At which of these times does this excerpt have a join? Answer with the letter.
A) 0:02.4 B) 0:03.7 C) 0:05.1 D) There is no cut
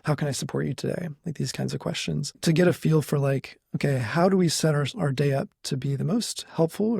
A